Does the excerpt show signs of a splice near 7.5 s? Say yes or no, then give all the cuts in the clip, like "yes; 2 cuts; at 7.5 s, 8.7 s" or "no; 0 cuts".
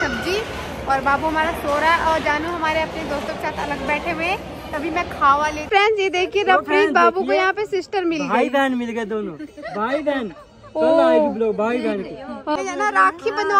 no; 2 cuts; at 5.6 s, 12.6 s